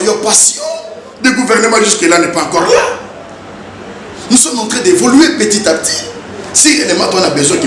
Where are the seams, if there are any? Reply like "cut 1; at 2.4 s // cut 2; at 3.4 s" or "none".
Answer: none